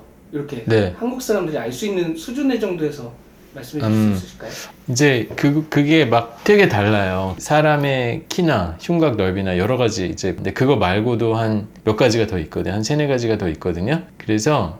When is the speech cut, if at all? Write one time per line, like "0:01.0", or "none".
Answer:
none